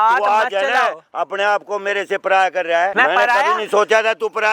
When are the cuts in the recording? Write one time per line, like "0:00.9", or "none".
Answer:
0:02.9